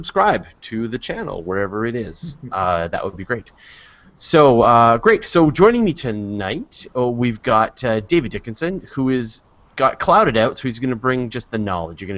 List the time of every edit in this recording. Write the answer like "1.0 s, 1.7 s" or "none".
9.3 s

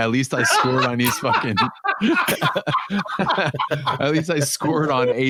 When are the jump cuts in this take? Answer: none

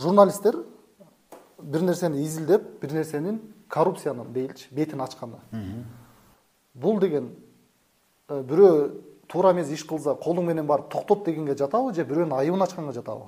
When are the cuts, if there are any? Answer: none

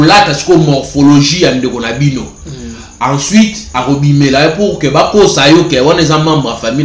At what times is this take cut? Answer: none

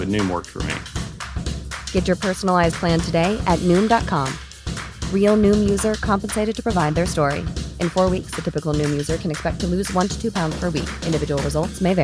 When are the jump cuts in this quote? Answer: none

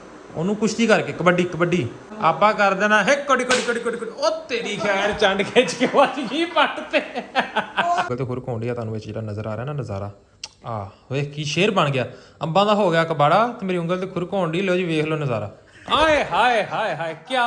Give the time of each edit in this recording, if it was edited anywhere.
2.0 s, 8.1 s

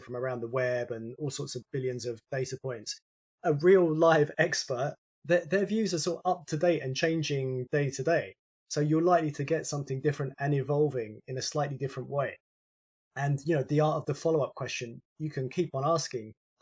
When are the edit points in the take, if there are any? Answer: 5.0 s

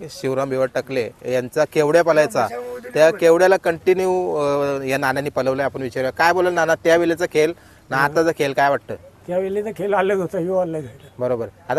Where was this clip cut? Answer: none

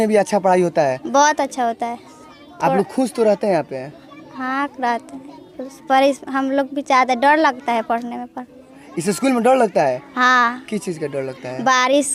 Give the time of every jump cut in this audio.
none

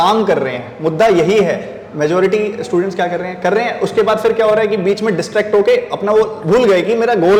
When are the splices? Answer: none

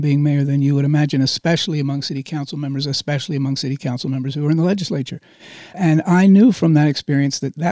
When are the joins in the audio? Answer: 5.7 s

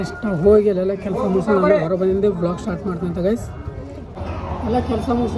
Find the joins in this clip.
4.2 s

